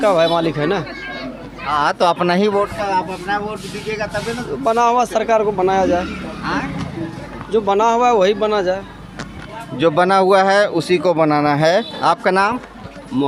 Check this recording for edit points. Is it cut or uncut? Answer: uncut